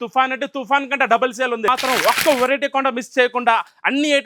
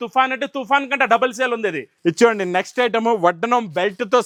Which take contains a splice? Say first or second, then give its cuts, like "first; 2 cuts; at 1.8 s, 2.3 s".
first; 1 cut; at 1.7 s